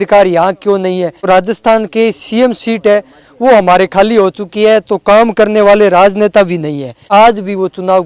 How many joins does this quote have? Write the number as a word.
two